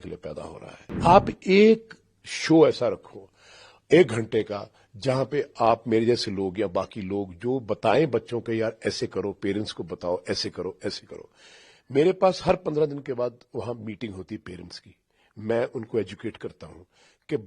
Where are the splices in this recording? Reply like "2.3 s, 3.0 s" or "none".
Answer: 1.0 s